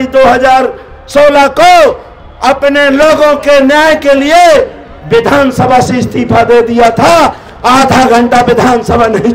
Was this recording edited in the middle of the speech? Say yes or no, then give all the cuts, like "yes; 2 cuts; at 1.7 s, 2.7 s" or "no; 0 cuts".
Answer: no; 0 cuts